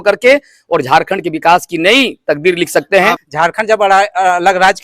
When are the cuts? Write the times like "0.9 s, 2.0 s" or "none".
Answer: 3.3 s

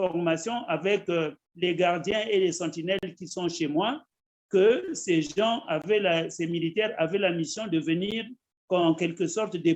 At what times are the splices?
none

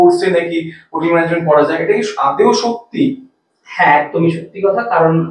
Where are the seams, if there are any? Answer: none

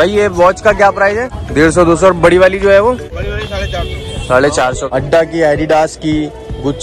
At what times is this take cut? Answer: 1.4 s, 3.1 s, 4.8 s

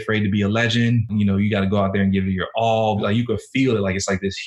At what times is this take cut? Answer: 1.1 s, 3.0 s

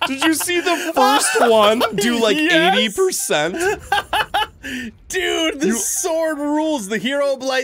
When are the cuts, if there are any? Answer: none

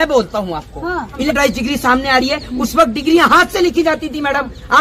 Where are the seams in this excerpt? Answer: 1.3 s

